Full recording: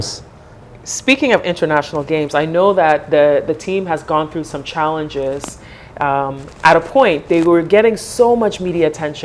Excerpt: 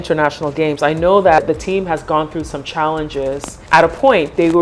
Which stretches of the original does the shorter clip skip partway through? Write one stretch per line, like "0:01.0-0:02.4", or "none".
0:02.9-0:03.4
0:05.5-0:06.5